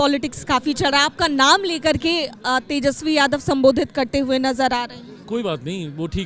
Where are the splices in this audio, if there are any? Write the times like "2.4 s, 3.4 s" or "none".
none